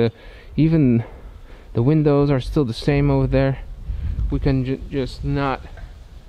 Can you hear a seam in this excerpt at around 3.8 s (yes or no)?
no